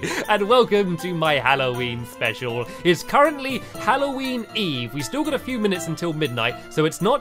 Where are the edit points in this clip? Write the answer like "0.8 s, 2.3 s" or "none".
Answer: none